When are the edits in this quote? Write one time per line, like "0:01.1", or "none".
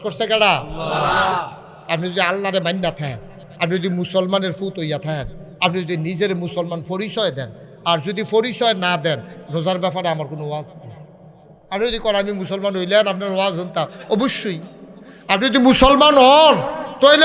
none